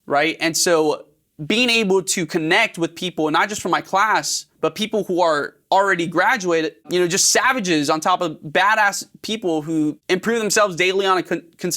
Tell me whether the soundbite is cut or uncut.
cut